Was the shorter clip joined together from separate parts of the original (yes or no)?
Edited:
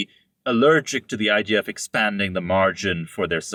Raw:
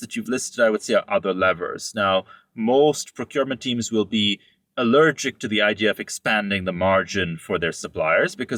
no